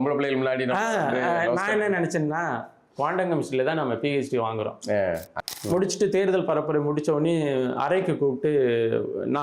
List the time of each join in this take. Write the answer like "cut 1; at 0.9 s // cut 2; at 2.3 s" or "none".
cut 1; at 5.3 s